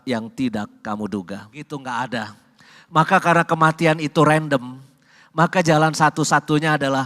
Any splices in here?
yes; 1 cut; at 1.7 s

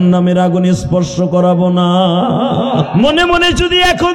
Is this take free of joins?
no; 1 cut; at 2.9 s

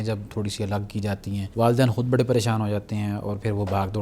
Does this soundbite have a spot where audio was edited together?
yes; 1 cut; at 1.5 s

